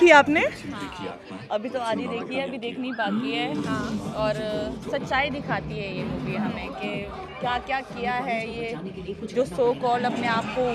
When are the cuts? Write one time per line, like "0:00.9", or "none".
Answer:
none